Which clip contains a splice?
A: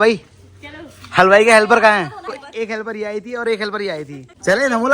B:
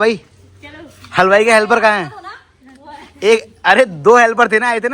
A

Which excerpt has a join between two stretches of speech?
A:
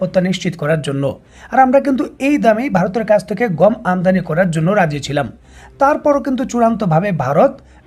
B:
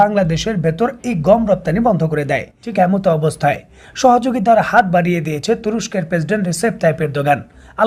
B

